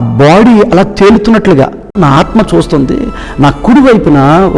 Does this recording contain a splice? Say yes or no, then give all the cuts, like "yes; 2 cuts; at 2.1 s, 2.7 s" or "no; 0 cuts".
yes; 1 cut; at 2.0 s